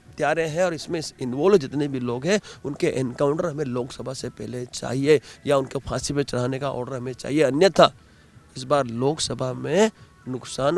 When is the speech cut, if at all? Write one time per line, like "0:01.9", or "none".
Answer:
none